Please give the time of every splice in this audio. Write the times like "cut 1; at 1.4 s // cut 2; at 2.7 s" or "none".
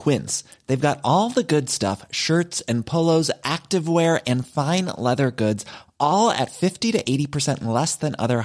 none